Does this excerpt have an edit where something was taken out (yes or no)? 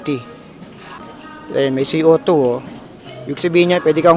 yes